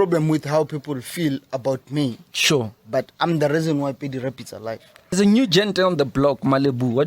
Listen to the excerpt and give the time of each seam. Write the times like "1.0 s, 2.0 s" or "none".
5.1 s